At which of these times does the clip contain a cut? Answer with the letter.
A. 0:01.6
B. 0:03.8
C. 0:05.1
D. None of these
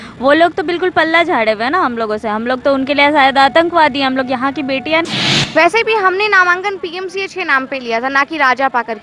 C